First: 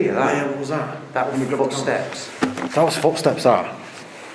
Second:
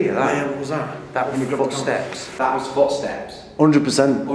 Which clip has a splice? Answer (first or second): second